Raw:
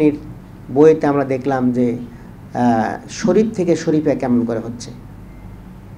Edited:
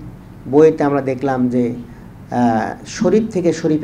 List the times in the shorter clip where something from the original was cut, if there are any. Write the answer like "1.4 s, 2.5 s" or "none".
none

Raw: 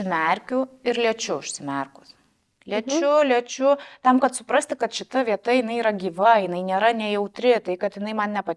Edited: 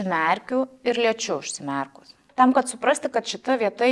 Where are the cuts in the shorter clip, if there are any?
2.2 s

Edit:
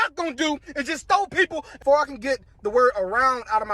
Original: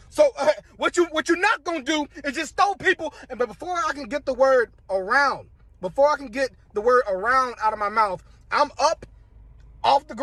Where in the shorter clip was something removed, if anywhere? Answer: 1.7 s

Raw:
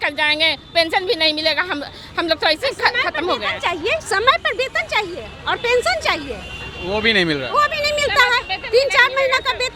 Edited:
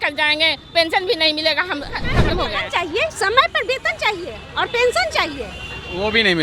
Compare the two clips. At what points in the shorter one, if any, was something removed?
2.1 s

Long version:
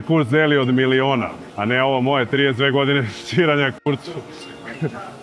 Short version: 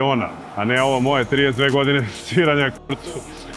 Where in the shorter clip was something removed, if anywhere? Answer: none

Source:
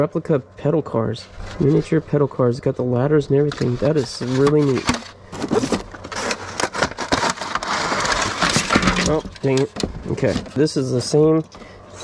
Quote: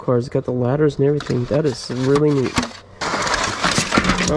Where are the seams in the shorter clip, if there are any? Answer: 3.0 s

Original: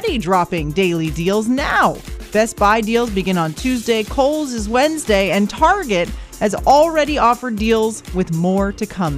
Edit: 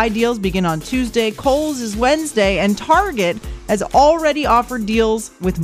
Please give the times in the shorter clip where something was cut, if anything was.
none

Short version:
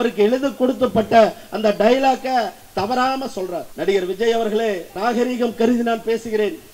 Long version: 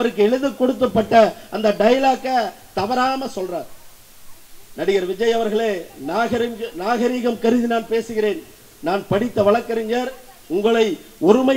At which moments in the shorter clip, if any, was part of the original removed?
3.7 s, 4.9 s

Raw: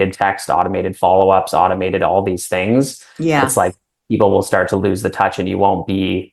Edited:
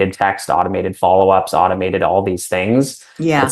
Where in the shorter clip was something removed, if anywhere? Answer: none

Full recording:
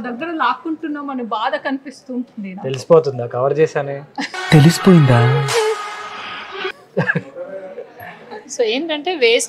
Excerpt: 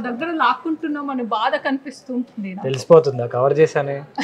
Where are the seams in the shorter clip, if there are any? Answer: none

